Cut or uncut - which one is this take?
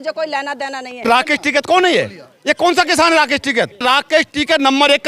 cut